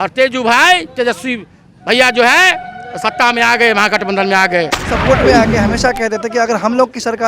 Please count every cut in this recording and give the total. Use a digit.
1